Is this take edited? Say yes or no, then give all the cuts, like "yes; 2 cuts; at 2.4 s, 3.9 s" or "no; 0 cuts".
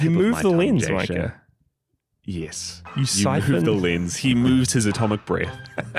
no; 0 cuts